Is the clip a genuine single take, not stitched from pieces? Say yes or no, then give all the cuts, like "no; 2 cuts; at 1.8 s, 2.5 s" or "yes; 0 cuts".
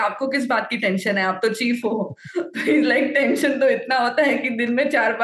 yes; 0 cuts